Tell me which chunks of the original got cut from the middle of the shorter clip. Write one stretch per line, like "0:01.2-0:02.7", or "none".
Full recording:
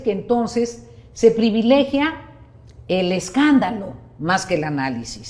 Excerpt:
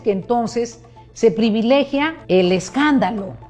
0:02.2-0:02.8